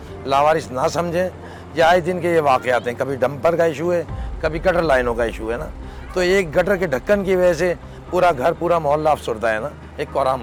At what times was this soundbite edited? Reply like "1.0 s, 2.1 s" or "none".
none